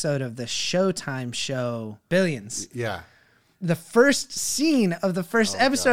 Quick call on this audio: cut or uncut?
cut